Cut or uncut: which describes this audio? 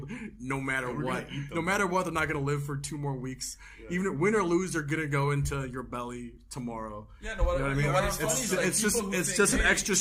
uncut